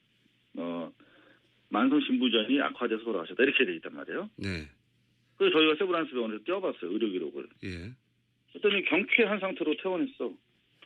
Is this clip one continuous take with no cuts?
yes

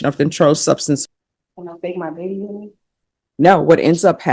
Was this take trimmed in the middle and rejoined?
yes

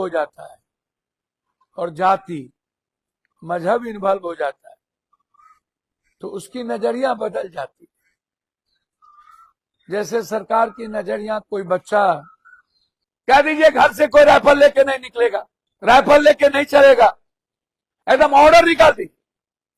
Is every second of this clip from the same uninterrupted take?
no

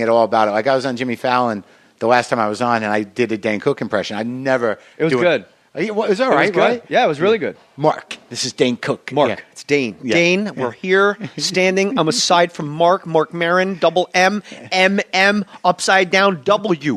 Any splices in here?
yes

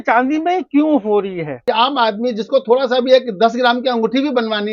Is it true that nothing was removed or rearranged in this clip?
no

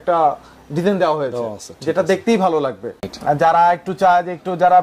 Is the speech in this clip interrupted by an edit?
yes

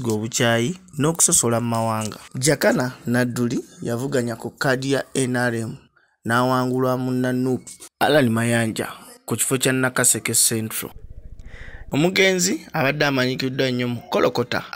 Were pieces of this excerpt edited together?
no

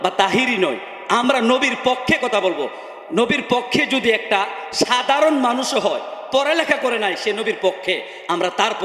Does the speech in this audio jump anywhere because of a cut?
no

